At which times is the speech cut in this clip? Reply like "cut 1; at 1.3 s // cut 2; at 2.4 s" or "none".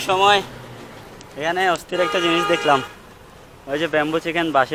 none